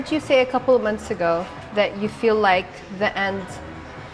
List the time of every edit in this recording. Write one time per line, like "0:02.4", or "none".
none